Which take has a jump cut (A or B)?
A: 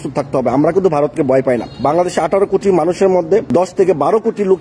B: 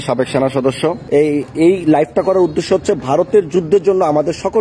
A